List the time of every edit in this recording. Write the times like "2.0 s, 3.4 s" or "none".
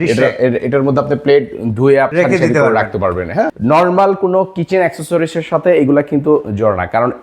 2.1 s, 3.5 s